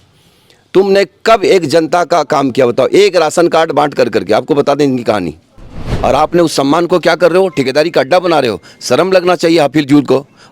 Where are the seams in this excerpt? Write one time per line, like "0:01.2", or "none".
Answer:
0:05.9